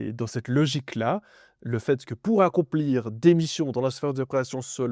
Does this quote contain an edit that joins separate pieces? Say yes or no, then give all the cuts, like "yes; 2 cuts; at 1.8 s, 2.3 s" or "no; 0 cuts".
no; 0 cuts